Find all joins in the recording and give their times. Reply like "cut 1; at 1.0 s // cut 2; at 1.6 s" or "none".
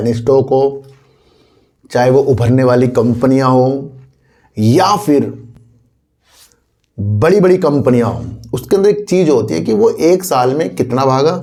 none